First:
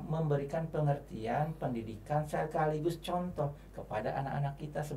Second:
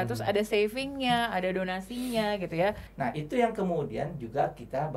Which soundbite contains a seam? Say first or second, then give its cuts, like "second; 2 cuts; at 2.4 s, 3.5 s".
second; 1 cut; at 2.9 s